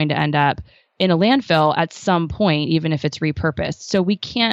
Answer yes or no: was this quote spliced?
no